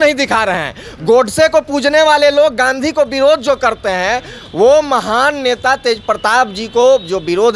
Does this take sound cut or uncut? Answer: uncut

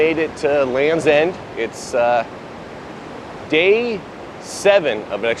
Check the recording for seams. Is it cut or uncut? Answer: uncut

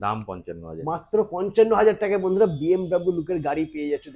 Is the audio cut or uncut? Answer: uncut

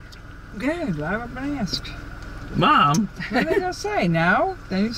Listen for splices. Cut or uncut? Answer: uncut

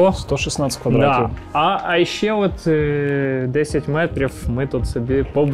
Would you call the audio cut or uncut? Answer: uncut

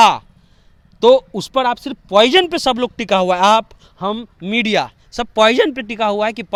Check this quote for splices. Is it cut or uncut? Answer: uncut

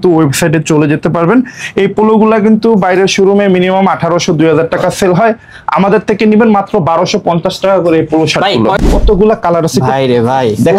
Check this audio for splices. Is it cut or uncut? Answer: cut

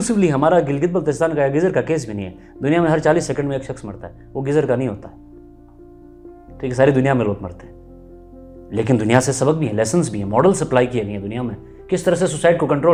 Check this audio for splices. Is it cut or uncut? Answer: uncut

